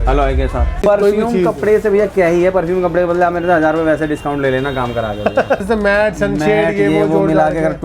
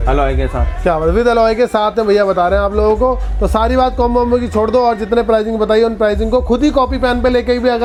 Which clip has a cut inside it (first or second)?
first